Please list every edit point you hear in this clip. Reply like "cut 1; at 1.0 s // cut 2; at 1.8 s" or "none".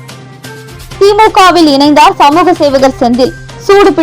cut 1; at 0.9 s

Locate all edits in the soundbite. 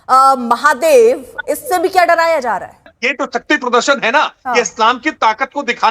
cut 1; at 3.0 s

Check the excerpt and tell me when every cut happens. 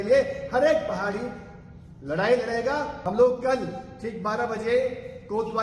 cut 1; at 3.0 s

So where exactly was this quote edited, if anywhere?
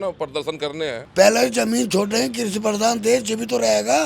cut 1; at 1.0 s

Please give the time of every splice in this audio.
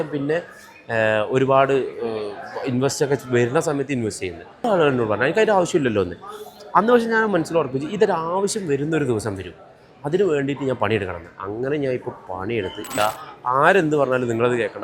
cut 1; at 4.6 s // cut 2; at 12.9 s

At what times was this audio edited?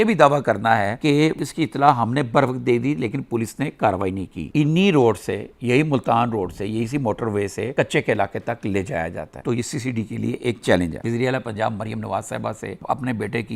cut 1; at 4.5 s // cut 2; at 9.4 s // cut 3; at 11.0 s

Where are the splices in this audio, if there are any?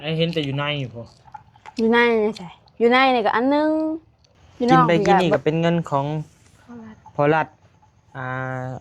cut 1; at 4.8 s

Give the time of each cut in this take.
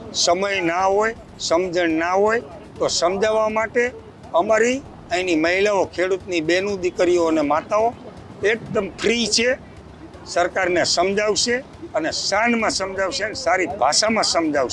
none

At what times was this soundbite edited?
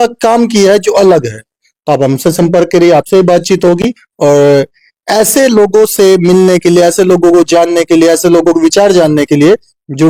none

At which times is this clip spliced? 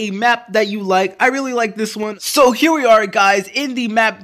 cut 1; at 2.2 s

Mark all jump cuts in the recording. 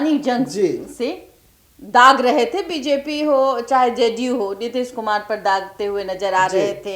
none

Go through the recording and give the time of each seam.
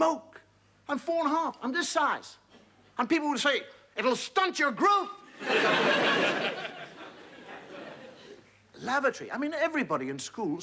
cut 1; at 3.2 s

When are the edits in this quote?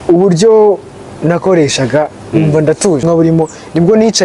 cut 1; at 3.0 s

